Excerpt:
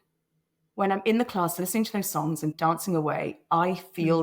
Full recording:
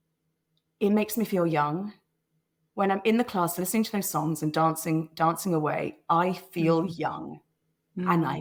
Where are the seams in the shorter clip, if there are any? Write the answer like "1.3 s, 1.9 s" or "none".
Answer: 2.5 s